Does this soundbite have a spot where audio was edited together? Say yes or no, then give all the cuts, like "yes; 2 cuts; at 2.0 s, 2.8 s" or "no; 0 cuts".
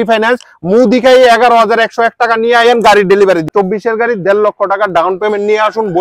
yes; 1 cut; at 3.5 s